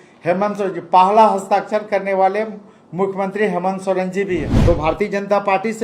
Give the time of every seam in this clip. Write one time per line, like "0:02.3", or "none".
0:04.5